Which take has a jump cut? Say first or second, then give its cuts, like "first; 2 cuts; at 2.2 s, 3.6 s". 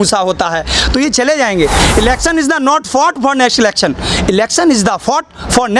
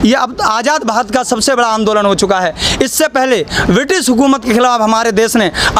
first; 1 cut; at 1.8 s